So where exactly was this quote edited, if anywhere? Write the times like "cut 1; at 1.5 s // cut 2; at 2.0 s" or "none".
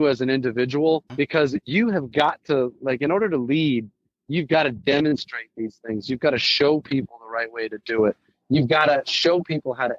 cut 1; at 1.1 s